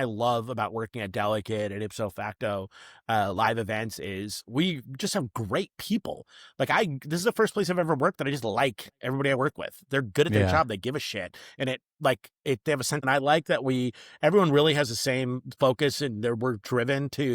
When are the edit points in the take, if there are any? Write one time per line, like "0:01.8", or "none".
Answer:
0:13.0

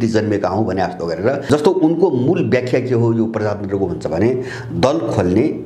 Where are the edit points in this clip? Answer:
0:01.4

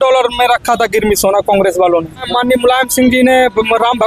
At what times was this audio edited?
0:02.2

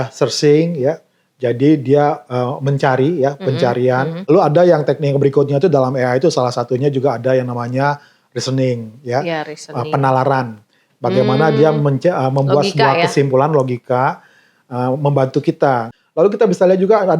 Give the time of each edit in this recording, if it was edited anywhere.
0:04.2
0:15.9

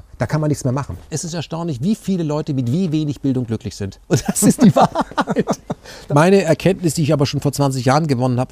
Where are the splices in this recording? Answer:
0:01.1
0:05.9

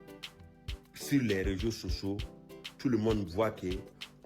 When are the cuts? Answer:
0:01.1

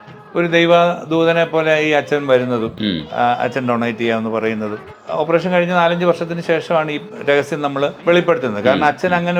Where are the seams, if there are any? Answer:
0:04.9
0:08.0

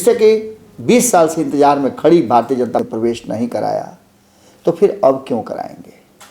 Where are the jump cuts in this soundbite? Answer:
0:02.8

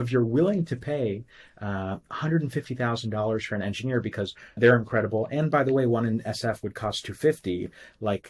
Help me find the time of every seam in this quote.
0:04.6

